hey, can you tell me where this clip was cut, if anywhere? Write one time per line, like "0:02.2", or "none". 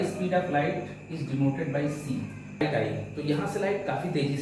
0:02.6